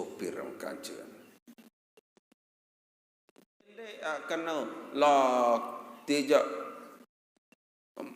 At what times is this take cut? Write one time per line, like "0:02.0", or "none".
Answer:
0:04.0